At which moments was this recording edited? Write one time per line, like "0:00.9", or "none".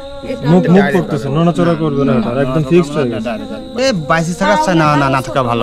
0:03.8